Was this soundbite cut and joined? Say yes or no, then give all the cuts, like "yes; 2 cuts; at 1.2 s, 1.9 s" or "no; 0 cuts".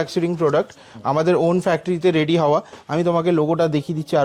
no; 0 cuts